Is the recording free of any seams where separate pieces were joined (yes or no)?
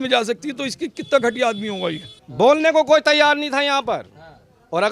no